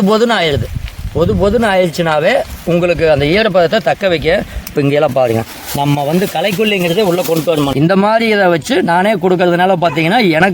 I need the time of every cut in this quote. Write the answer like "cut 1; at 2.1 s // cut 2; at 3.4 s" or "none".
cut 1; at 7.7 s